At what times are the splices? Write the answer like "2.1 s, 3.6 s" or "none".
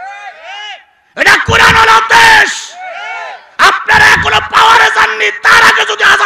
none